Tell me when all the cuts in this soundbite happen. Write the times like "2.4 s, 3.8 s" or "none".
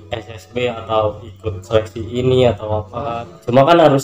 3.1 s